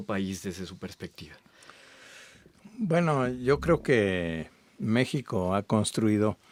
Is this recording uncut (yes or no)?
yes